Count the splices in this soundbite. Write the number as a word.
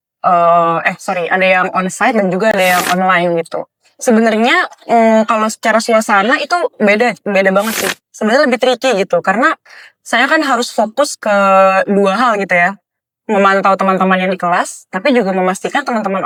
zero